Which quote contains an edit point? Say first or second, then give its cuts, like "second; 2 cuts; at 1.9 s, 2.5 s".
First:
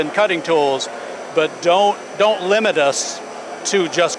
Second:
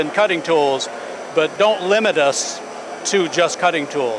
second; 1 cut; at 1.5 s